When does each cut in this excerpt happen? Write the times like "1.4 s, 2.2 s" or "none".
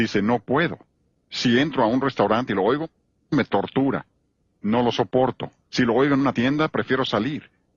2.9 s